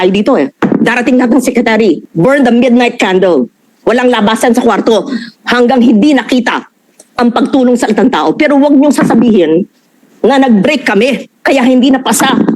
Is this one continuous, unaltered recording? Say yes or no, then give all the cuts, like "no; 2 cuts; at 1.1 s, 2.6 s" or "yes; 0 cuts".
no; 1 cut; at 2.1 s